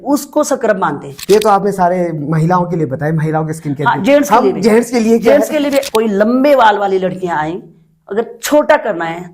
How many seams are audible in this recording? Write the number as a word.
two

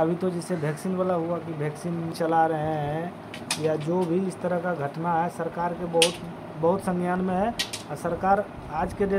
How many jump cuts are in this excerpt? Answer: one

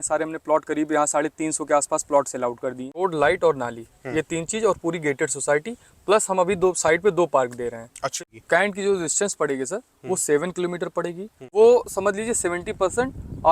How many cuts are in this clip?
three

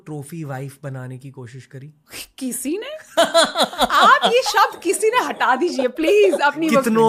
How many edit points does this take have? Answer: zero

